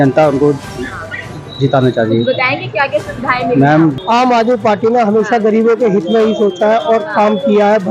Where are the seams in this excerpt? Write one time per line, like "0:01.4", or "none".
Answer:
0:04.0